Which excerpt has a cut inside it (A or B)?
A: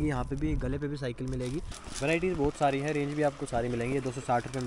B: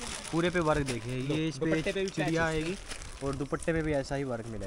A